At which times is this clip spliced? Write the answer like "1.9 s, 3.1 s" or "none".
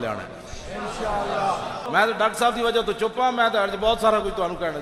1.8 s